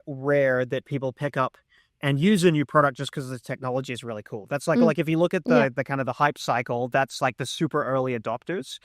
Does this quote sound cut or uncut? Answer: uncut